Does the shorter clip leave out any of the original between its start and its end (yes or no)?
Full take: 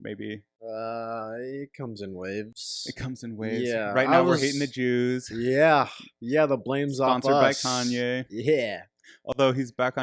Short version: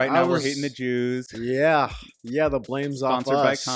no